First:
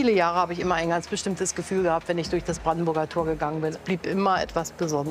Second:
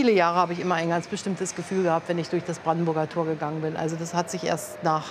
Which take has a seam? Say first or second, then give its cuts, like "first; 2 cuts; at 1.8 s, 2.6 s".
first; 1 cut; at 3.8 s